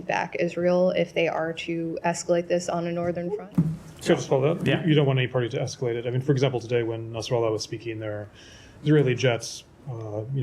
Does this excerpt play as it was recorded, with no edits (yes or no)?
no